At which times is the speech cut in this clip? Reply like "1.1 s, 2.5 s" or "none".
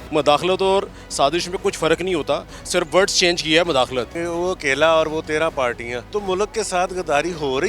4.2 s, 5.9 s

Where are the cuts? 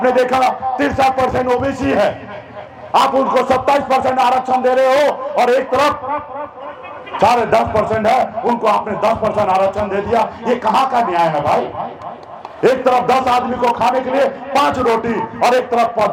none

